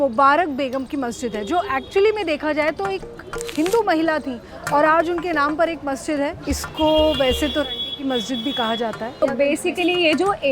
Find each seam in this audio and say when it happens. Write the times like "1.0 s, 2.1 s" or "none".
6.4 s, 9.4 s